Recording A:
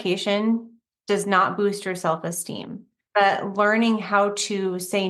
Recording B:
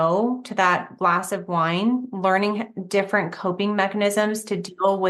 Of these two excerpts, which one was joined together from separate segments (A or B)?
A